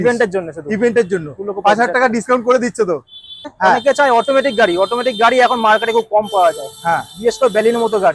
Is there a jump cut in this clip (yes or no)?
yes